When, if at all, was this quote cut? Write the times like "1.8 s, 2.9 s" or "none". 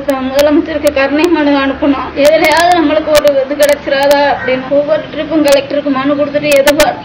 2.1 s, 4.6 s